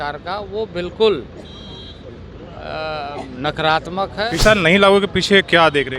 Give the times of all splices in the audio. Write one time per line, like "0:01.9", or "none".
0:04.3